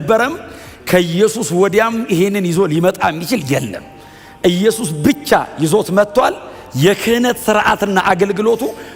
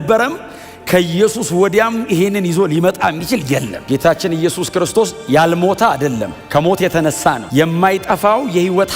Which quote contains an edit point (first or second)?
second